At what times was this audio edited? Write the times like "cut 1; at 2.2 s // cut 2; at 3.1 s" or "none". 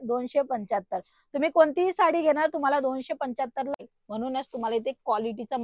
cut 1; at 3.7 s